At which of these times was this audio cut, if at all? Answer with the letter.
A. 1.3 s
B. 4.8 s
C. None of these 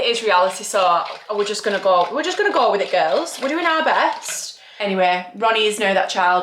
B